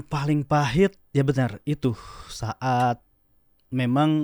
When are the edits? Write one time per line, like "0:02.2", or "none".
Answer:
none